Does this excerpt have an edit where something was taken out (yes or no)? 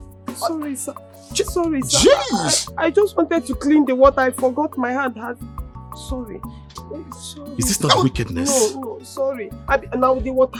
no